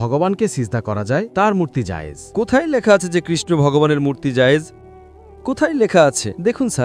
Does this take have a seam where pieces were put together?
no; 0 cuts

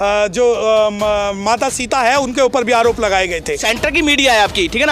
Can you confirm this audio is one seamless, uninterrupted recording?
no; 1 cut; at 3.6 s

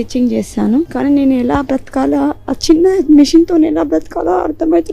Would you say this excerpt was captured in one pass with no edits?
no; 1 cut; at 0.9 s

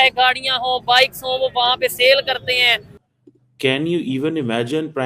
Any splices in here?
yes; 1 cut; at 2.9 s

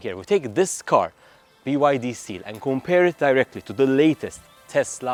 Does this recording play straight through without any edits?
yes; 0 cuts

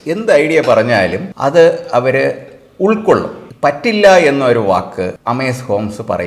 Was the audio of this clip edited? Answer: yes; 3 cuts; at 1.3 s, 3.4 s, 5.2 s

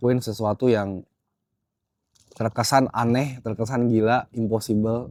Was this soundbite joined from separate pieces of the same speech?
no; 0 cuts

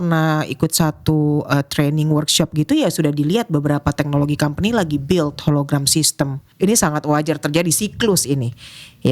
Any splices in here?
yes; 1 cut; at 6.4 s

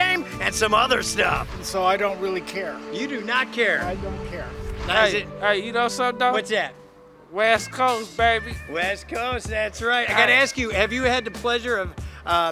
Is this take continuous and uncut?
no; 2 cuts; at 1.5 s, 4.6 s

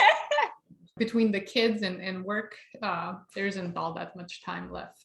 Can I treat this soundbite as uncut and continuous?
no; 1 cut; at 0.9 s

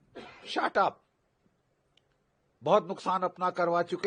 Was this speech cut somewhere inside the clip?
no; 0 cuts

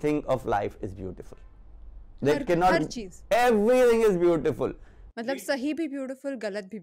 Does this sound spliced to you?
no; 0 cuts

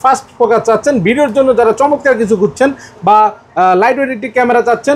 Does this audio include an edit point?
no; 0 cuts

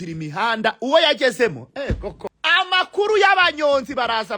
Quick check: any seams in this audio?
yes; 1 cut; at 2.2 s

